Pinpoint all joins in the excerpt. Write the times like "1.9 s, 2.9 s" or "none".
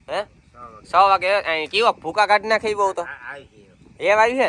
none